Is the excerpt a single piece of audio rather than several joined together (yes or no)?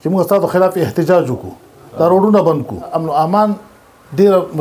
no